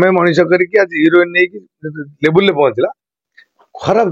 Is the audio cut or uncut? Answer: uncut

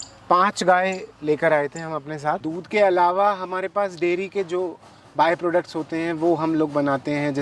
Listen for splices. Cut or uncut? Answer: cut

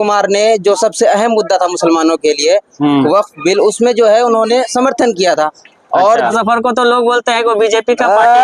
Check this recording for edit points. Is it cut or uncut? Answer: cut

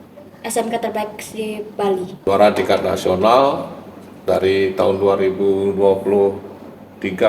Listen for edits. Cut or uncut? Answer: cut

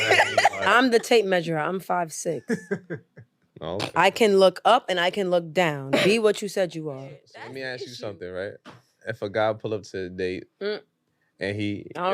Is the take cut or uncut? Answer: cut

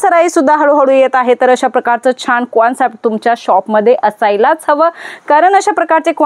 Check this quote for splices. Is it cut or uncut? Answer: uncut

